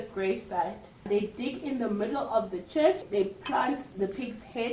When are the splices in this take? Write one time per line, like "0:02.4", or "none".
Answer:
0:01.1
0:03.0